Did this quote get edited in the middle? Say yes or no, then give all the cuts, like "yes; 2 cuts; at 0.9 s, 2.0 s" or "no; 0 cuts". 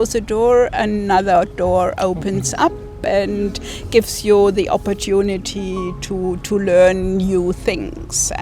no; 0 cuts